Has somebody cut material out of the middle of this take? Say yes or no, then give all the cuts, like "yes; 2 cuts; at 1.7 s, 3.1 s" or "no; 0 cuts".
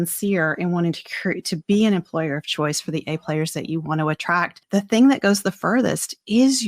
yes; 1 cut; at 4.6 s